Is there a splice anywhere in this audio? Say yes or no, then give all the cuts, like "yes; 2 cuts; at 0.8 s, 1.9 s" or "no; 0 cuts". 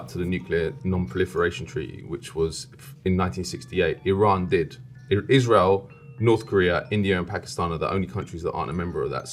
no; 0 cuts